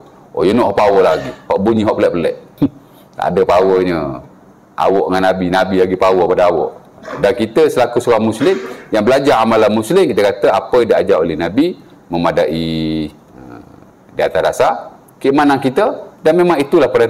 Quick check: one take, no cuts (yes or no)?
no